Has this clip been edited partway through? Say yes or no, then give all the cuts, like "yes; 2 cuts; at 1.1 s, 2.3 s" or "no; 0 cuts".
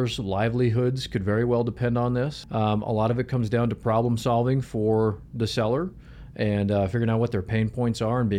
yes; 1 cut; at 2.4 s